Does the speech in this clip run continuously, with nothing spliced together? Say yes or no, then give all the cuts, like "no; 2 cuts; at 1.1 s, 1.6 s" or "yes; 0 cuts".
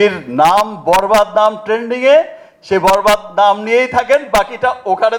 yes; 0 cuts